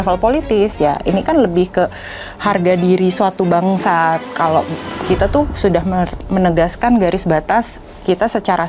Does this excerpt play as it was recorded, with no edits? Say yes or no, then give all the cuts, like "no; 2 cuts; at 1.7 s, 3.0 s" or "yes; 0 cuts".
yes; 0 cuts